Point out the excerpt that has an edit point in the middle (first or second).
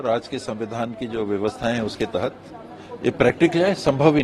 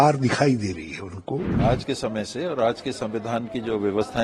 second